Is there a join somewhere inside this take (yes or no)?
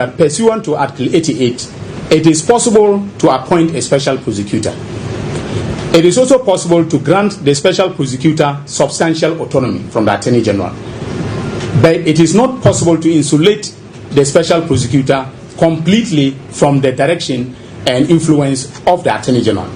no